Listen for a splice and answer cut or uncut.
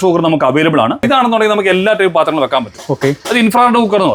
uncut